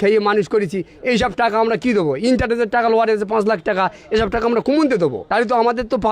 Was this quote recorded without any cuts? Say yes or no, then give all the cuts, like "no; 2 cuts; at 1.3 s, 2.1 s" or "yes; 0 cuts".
no; 1 cut; at 5.2 s